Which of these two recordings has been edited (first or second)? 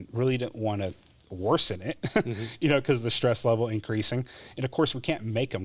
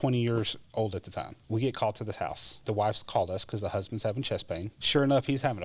second